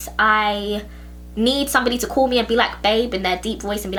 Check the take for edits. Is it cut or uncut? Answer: uncut